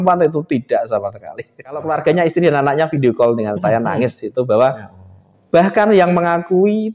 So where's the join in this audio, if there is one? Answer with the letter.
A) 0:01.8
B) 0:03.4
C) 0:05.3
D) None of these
A